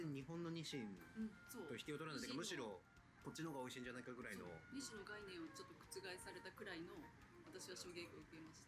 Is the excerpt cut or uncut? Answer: uncut